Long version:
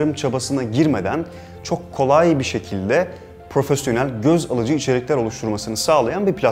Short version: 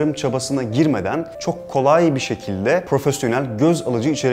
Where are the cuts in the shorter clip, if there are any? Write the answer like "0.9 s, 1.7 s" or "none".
1.3 s, 2.8 s